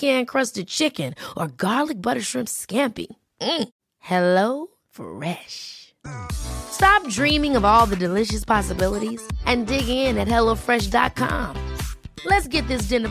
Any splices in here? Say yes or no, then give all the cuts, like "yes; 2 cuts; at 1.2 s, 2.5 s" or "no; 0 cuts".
no; 0 cuts